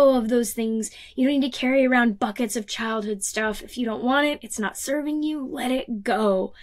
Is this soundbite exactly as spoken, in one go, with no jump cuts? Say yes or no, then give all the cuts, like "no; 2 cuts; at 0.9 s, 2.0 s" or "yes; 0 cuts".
yes; 0 cuts